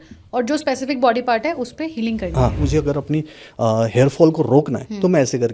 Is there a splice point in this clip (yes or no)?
yes